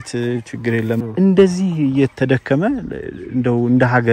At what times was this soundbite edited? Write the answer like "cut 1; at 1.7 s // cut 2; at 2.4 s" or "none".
cut 1; at 1.0 s